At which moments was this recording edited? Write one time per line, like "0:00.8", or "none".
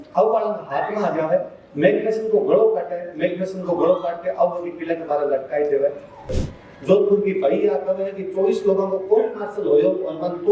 0:06.3